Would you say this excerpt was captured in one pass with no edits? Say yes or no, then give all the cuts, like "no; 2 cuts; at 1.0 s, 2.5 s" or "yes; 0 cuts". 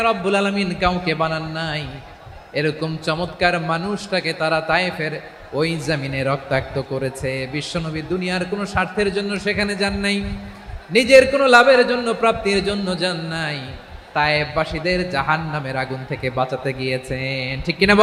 yes; 0 cuts